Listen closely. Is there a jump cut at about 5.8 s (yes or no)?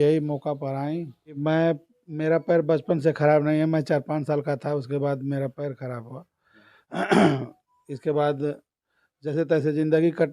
no